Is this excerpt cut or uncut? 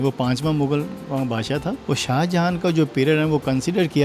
cut